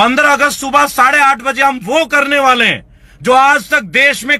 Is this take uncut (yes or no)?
yes